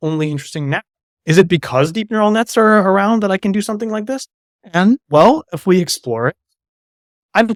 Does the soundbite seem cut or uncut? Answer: uncut